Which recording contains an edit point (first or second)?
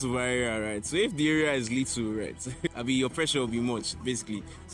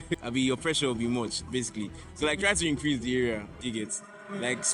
second